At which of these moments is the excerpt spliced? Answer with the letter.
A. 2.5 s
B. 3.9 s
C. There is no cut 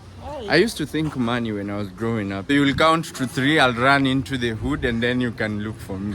A